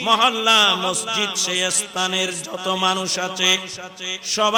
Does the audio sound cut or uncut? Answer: uncut